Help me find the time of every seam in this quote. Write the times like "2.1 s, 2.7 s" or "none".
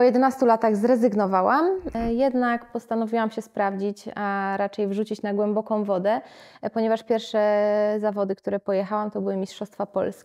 1.9 s